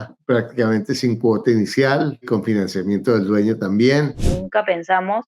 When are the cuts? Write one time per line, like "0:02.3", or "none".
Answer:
0:04.2